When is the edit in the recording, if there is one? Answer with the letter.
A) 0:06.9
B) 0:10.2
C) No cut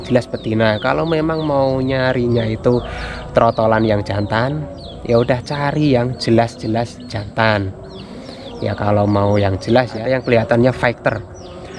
B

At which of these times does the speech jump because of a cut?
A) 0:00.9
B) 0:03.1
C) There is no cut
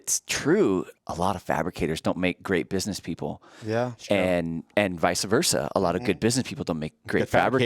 A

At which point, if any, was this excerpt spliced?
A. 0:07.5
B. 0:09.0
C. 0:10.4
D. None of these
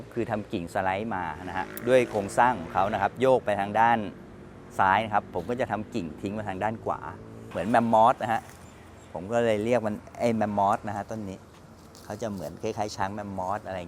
A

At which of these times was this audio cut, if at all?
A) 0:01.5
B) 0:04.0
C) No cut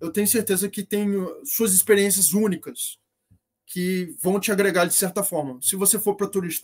C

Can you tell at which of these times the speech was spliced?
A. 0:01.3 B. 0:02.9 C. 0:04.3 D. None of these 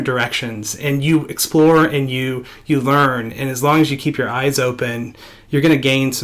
D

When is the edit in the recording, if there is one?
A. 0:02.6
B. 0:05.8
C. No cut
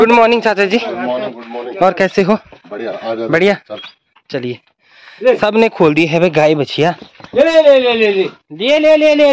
C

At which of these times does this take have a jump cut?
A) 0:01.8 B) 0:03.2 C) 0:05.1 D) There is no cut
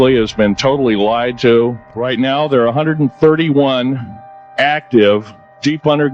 A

